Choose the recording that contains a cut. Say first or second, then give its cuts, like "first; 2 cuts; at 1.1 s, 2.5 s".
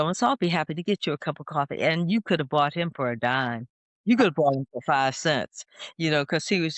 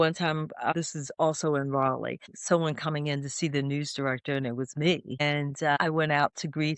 second; 3 cuts; at 0.7 s, 2.3 s, 5.6 s